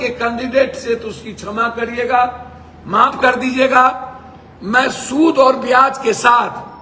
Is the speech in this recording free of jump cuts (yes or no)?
yes